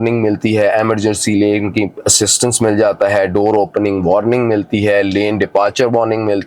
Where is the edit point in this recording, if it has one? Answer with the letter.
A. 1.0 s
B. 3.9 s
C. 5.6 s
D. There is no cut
D